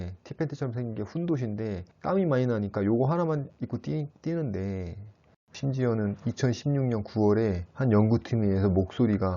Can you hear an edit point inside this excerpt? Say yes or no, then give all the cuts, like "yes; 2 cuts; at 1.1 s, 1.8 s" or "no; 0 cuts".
yes; 1 cut; at 5.4 s